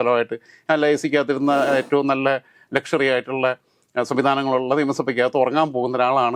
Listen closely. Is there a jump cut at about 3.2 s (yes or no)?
no